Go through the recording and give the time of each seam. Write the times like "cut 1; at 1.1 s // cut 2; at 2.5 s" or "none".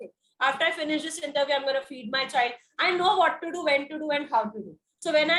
none